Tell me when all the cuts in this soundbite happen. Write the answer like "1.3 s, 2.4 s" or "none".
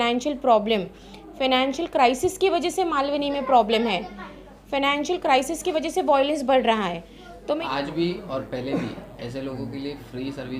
7.6 s